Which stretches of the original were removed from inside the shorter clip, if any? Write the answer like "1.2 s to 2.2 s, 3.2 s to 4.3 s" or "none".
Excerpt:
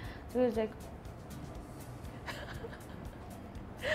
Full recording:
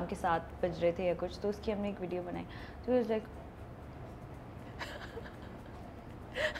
none